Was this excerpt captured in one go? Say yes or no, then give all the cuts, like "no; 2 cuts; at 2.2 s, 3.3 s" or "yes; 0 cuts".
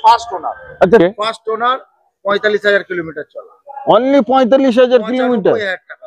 no; 1 cut; at 1.0 s